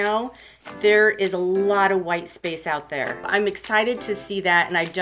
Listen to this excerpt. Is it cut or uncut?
cut